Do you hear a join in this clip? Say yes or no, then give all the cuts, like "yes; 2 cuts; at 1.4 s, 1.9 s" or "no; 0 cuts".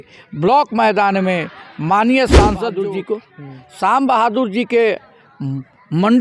yes; 1 cut; at 2.8 s